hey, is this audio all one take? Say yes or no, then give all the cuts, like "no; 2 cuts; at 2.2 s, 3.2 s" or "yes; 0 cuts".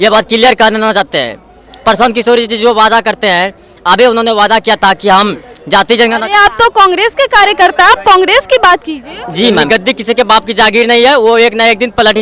no; 1 cut; at 9.6 s